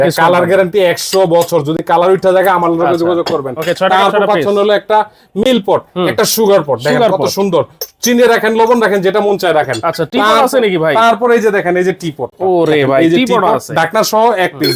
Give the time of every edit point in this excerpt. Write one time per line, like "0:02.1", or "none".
none